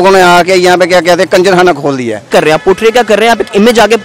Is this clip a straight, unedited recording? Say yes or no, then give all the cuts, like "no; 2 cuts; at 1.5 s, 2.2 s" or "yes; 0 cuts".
no; 1 cut; at 2.3 s